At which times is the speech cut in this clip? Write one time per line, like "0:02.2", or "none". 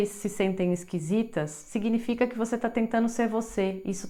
none